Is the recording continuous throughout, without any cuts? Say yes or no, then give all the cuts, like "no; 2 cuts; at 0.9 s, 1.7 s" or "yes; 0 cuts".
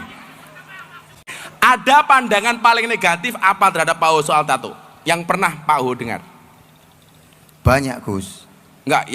no; 1 cut; at 1.2 s